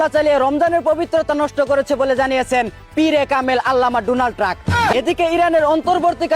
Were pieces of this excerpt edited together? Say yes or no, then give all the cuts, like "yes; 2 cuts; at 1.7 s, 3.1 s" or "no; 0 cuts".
yes; 1 cut; at 4.9 s